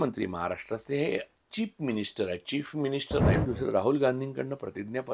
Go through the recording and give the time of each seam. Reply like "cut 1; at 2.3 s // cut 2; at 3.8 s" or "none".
cut 1; at 1.3 s // cut 2; at 3.3 s

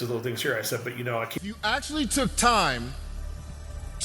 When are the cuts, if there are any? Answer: cut 1; at 1.3 s

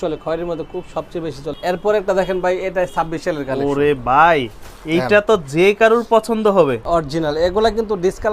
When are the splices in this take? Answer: cut 1; at 1.5 s // cut 2; at 6.8 s

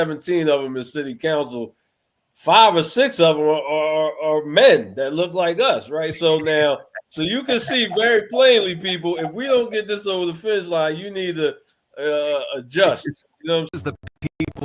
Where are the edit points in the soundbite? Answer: cut 1; at 13.7 s

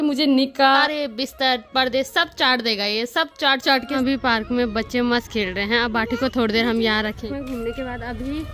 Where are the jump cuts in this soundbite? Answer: cut 1; at 0.8 s // cut 2; at 4.0 s // cut 3; at 7.2 s

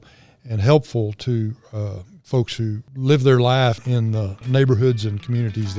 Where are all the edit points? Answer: cut 1; at 2.9 s // cut 2; at 3.8 s

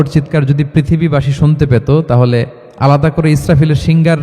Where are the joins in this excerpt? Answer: cut 1; at 2.6 s

